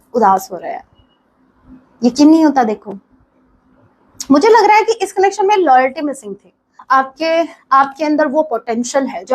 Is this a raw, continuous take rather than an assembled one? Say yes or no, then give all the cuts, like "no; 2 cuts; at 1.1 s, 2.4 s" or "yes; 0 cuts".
no; 1 cut; at 6.7 s